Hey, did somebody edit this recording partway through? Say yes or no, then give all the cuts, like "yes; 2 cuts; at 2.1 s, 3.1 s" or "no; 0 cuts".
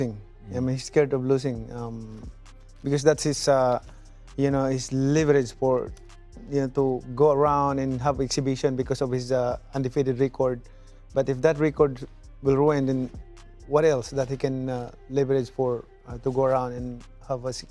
no; 0 cuts